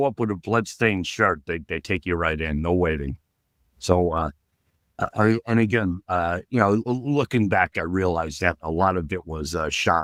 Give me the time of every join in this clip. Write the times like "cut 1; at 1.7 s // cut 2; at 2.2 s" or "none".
none